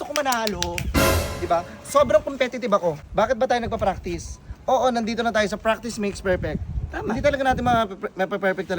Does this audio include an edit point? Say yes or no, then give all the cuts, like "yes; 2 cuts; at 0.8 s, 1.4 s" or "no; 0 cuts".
yes; 1 cut; at 3.0 s